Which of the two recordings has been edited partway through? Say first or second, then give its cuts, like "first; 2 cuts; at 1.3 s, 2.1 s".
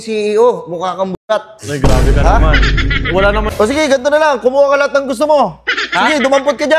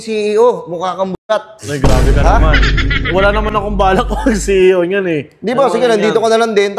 first; 1 cut; at 3.5 s